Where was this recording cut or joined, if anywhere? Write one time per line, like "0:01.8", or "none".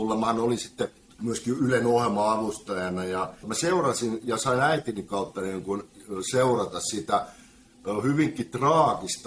0:01.1
0:03.5